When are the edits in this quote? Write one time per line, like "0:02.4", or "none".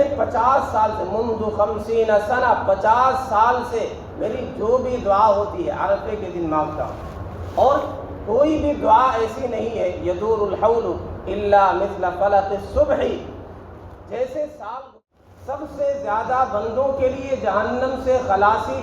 0:14.8

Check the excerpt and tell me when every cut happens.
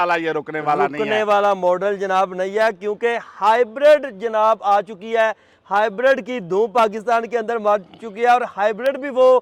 none

